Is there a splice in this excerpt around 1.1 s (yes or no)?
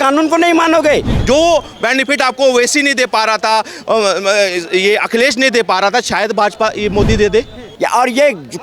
yes